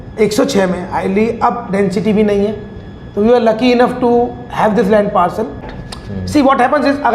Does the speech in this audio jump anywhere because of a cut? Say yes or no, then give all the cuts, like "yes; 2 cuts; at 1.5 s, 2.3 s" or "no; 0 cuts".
yes; 1 cut; at 5.7 s